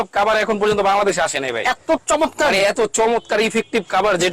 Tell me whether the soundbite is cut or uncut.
uncut